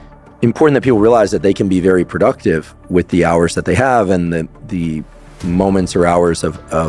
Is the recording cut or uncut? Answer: uncut